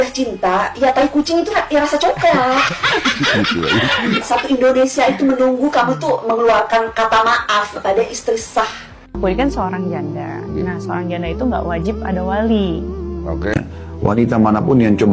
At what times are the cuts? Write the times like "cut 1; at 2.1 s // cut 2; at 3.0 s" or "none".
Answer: cut 1; at 9.1 s